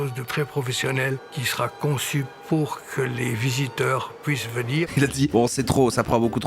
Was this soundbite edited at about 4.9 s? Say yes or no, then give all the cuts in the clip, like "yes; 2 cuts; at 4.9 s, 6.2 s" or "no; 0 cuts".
yes; 2 cuts; at 1.3 s, 4.9 s